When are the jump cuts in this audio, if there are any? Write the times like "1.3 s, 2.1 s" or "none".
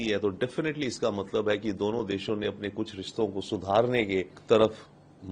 4.4 s